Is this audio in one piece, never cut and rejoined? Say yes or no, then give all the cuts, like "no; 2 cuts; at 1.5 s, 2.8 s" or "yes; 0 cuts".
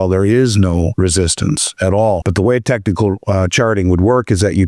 no; 2 cuts; at 0.9 s, 2.3 s